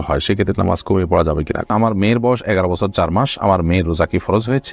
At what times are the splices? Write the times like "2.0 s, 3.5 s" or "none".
1.7 s